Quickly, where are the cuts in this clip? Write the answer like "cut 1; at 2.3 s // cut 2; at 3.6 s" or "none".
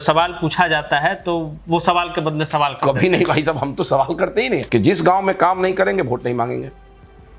cut 1; at 4.6 s